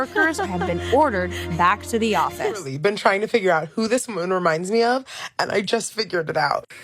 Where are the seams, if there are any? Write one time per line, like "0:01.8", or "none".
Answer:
0:02.7